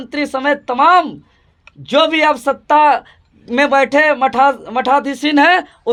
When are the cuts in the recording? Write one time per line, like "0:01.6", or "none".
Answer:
none